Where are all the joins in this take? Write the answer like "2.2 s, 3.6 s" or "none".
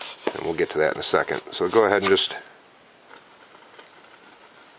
1.0 s